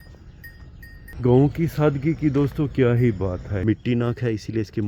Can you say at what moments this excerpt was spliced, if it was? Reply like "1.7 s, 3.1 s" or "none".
1.0 s, 3.5 s

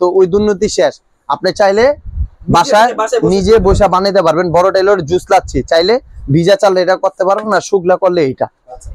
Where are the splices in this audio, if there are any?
none

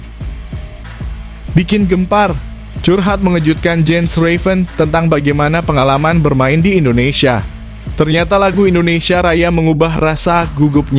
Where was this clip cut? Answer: 1.5 s

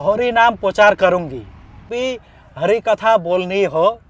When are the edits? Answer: 1.9 s

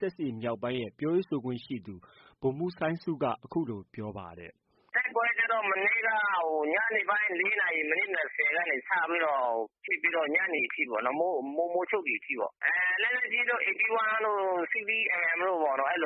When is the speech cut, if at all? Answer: none

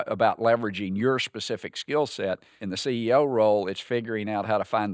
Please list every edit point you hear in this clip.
2.5 s

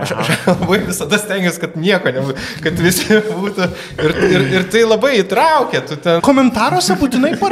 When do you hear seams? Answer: 6.2 s

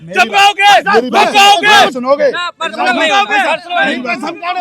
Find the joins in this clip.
none

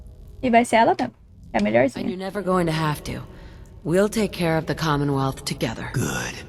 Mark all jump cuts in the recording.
none

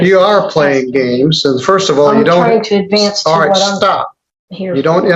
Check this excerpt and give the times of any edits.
none

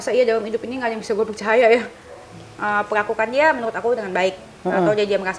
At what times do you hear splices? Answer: 2.3 s

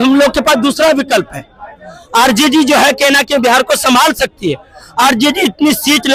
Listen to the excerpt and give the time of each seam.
none

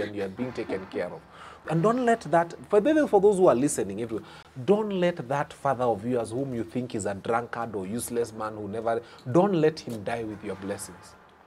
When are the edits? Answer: 1.6 s

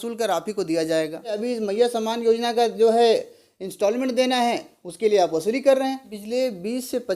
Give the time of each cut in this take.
1.4 s, 6.1 s

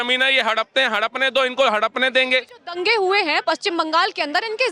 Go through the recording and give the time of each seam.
none

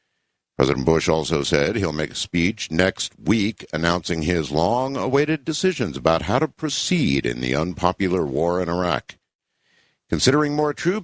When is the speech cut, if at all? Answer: none

